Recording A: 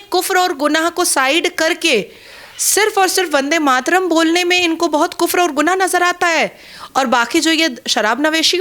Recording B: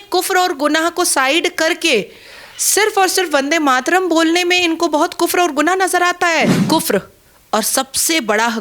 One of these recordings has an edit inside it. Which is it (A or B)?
B